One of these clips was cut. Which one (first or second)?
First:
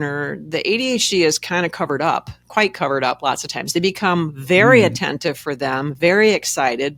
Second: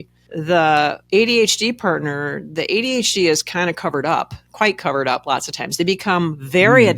second